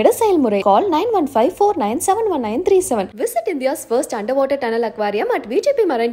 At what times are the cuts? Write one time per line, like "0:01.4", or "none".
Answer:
none

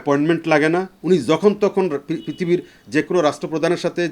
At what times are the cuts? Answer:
0:00.9

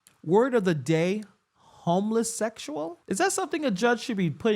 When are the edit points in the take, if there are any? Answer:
0:03.0

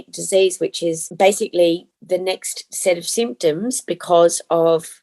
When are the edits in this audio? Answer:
0:01.0

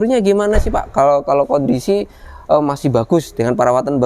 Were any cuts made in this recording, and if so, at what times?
none

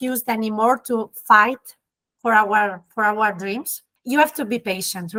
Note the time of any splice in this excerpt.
none

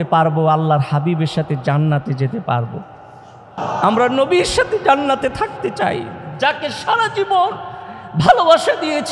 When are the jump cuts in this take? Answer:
0:03.6

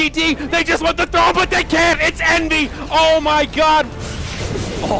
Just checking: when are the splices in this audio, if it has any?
0:04.0

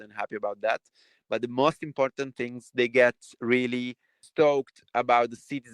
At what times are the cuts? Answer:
0:04.2

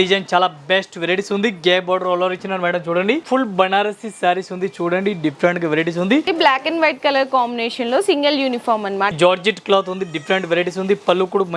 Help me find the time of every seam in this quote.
0:03.2
0:06.3
0:09.1

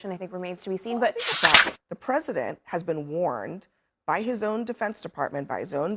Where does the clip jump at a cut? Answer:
0:01.4

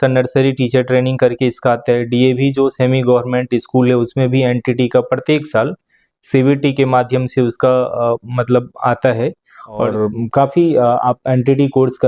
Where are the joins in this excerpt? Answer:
0:09.9

